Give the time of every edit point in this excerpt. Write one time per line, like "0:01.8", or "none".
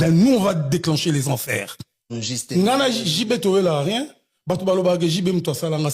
0:02.4